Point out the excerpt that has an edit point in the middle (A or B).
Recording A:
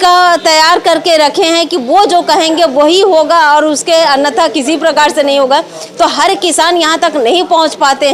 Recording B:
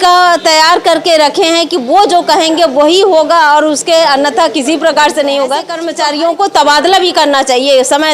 B